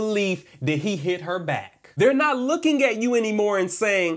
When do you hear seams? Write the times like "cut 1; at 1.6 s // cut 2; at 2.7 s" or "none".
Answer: cut 1; at 1.8 s

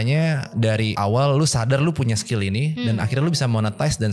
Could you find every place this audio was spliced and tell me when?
cut 1; at 0.9 s

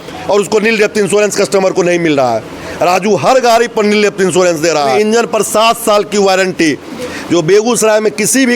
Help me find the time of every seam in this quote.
cut 1; at 4.9 s

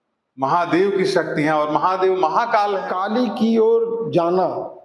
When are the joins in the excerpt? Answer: cut 1; at 3.0 s

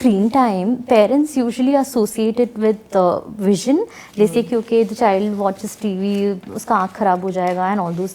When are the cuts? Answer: none

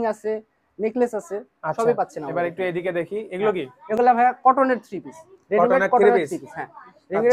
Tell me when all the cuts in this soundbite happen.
none

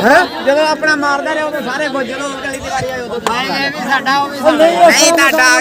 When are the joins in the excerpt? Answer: none

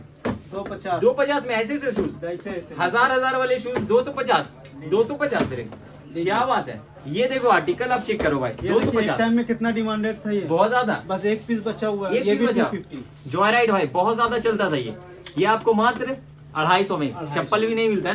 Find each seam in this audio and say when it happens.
none

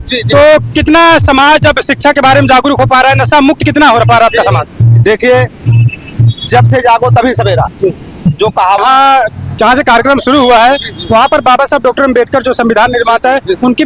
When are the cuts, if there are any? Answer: cut 1; at 8.8 s

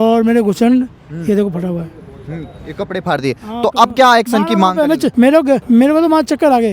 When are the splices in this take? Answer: cut 1; at 5.3 s

